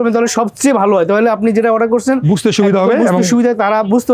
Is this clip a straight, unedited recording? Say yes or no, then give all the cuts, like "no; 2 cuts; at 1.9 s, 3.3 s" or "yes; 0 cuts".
yes; 0 cuts